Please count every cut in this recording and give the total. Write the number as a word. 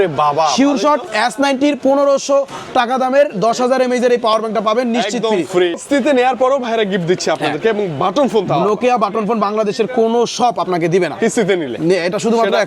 one